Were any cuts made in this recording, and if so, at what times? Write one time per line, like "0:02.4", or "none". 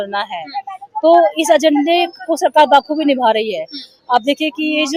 none